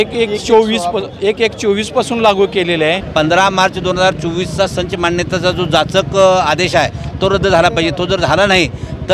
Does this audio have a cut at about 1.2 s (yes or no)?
no